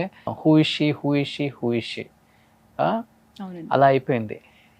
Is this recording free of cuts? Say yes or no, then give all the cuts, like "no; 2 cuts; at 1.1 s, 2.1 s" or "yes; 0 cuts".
yes; 0 cuts